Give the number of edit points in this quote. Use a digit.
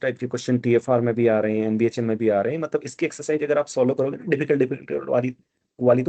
0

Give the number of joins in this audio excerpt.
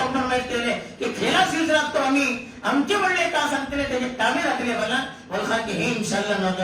0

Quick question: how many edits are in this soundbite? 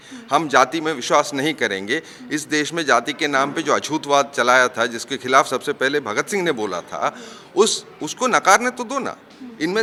0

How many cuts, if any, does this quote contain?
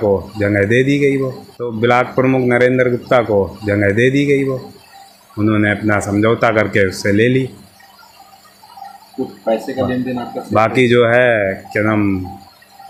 0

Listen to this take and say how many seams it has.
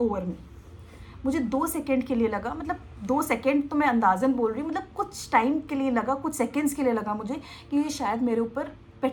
0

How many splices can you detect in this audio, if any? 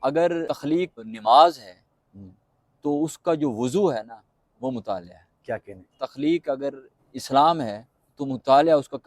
1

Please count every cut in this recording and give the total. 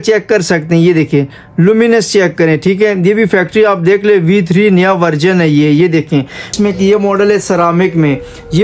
1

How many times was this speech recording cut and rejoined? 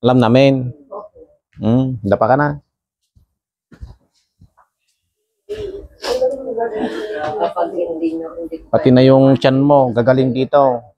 0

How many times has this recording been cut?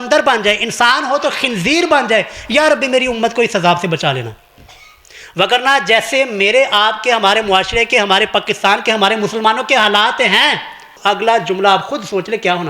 1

